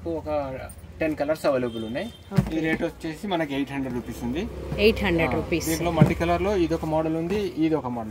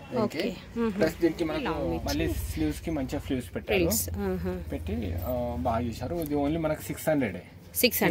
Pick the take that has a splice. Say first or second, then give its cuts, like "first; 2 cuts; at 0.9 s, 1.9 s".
second; 1 cut; at 1.8 s